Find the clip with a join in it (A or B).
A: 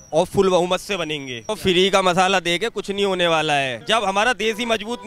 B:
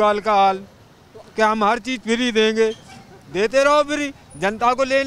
A